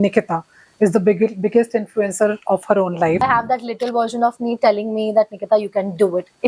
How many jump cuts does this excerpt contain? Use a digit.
1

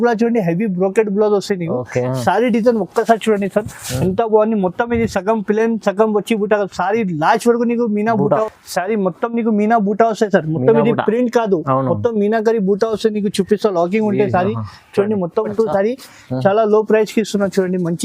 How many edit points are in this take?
2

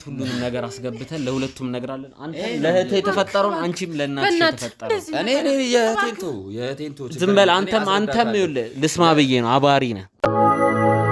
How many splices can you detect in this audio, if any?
1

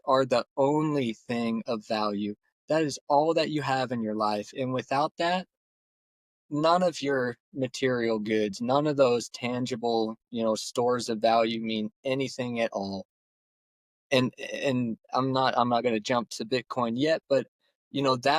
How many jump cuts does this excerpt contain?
0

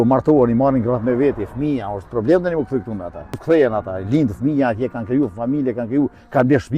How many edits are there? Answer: 1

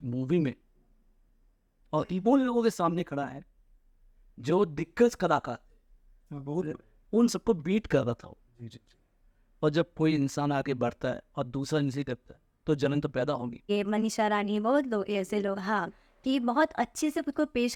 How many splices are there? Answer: 1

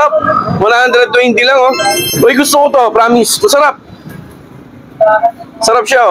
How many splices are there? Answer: 1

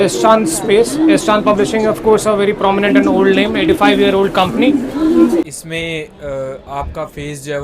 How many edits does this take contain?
1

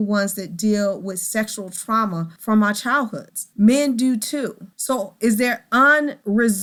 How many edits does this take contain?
0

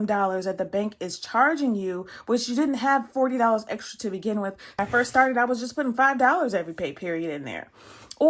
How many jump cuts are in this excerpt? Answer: 1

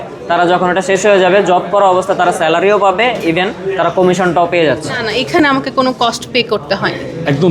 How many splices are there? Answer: 1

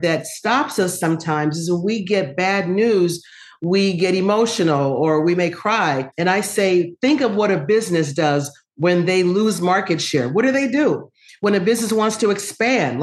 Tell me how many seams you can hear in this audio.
0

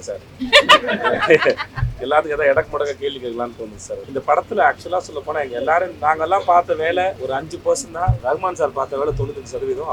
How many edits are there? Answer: 3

